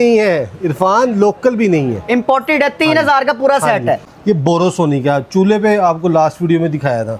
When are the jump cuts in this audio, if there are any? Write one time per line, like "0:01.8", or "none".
0:04.1